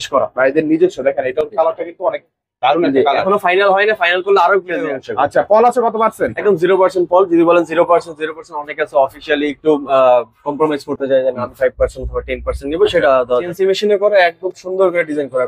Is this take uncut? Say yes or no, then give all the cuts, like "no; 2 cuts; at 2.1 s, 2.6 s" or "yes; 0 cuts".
no; 2 cuts; at 5.0 s, 13.5 s